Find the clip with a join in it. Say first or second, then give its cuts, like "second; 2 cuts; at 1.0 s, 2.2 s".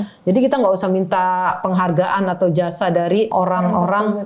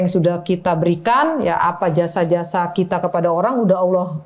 first; 1 cut; at 3.3 s